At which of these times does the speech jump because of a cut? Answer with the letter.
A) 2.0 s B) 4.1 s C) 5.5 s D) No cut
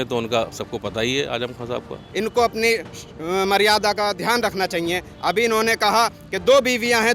A